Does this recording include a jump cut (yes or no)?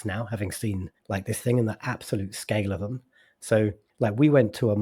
yes